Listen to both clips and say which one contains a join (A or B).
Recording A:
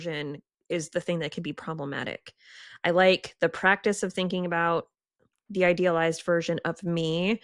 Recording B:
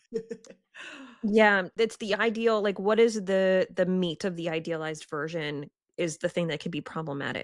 B